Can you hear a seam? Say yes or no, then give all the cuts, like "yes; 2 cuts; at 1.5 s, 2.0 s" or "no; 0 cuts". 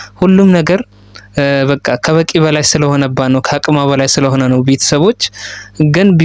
no; 0 cuts